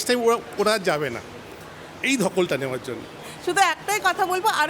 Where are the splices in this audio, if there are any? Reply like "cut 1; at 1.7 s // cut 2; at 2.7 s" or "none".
cut 1; at 3.2 s